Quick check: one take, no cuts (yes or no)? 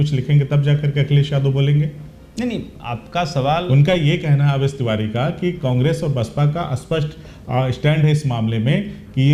yes